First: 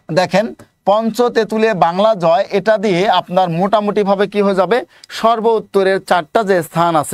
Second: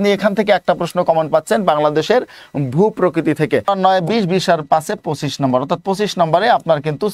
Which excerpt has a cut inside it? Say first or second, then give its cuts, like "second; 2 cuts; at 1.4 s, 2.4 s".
second; 1 cut; at 3.7 s